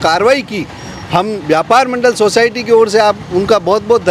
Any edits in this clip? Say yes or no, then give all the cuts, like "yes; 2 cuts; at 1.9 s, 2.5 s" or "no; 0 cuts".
no; 0 cuts